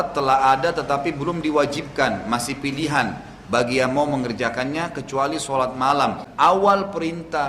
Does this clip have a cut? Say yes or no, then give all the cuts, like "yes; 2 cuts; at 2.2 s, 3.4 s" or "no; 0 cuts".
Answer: yes; 1 cut; at 6.2 s